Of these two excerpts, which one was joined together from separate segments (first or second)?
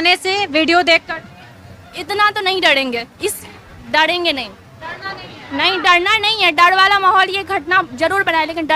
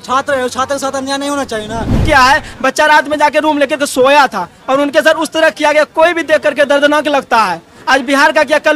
second